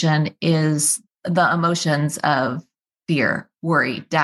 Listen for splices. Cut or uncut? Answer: cut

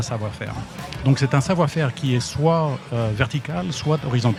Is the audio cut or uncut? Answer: uncut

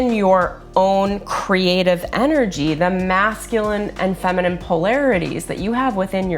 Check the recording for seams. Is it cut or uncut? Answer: uncut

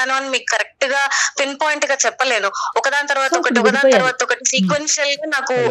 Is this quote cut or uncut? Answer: uncut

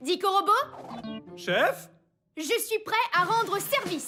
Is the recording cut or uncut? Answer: uncut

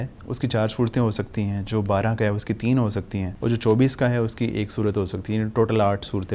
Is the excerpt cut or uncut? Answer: cut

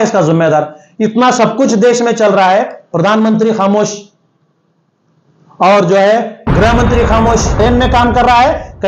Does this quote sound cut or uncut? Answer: cut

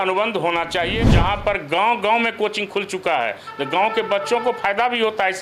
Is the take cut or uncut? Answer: cut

